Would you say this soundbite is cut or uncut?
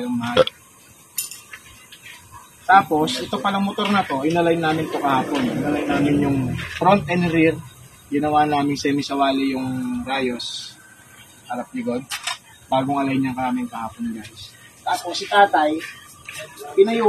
uncut